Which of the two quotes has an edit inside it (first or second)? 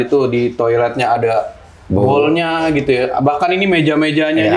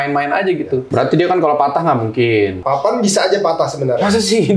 second